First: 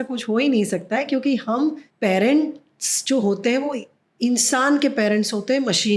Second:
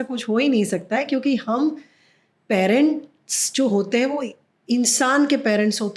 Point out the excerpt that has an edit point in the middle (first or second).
first